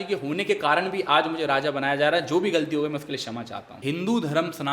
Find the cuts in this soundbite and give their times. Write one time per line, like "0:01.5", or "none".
0:03.8